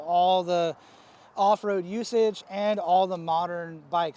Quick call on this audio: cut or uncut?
uncut